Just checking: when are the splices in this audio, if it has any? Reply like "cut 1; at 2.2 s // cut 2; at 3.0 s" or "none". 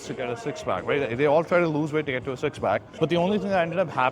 cut 1; at 2.9 s